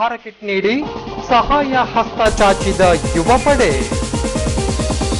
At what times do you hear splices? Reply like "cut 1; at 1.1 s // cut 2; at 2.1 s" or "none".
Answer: cut 1; at 3.8 s